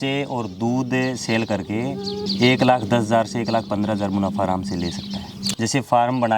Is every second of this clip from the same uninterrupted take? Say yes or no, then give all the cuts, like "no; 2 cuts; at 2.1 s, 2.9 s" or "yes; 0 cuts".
no; 2 cuts; at 2.2 s, 5.4 s